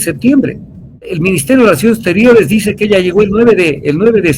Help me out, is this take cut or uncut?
cut